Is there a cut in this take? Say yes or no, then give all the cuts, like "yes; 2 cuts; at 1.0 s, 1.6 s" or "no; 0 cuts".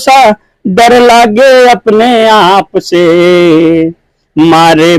no; 0 cuts